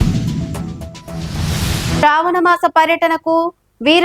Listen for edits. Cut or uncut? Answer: cut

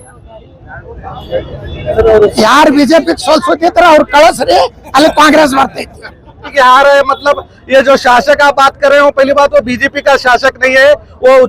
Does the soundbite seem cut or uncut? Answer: cut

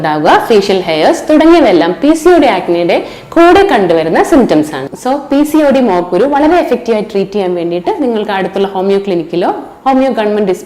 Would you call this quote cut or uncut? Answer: cut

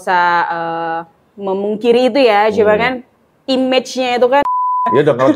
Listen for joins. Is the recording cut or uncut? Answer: cut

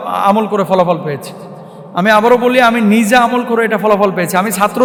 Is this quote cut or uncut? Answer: uncut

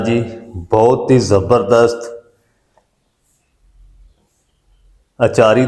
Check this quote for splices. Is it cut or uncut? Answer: uncut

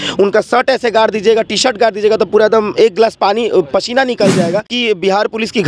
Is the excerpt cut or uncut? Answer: cut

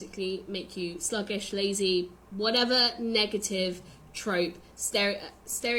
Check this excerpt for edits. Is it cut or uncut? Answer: cut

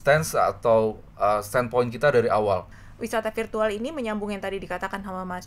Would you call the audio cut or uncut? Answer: cut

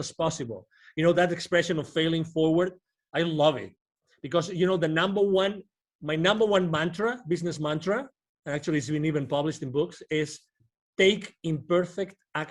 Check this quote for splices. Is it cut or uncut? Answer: uncut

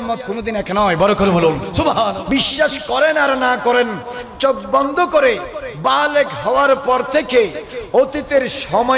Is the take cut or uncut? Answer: cut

